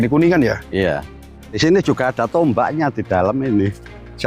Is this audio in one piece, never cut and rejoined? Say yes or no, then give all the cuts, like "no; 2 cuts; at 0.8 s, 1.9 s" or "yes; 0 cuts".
no; 1 cut; at 1.4 s